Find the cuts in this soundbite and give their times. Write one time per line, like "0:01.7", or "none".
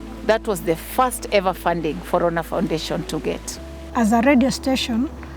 0:03.9